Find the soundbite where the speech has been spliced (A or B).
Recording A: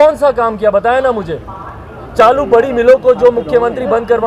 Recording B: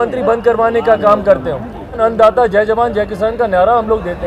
B